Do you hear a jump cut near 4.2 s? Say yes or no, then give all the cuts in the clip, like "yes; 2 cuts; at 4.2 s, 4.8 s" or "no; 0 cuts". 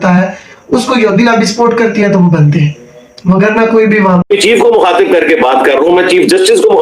yes; 1 cut; at 4.2 s